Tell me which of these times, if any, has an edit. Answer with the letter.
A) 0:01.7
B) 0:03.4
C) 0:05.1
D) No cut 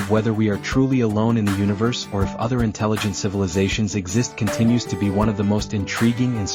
D